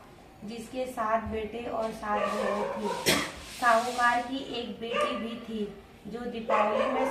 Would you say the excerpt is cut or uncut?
uncut